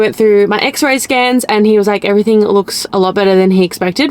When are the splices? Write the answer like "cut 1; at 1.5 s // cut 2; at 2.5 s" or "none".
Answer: none